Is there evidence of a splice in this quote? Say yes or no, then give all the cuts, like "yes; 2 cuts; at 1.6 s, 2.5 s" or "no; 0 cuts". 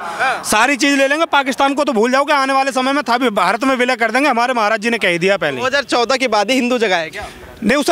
no; 0 cuts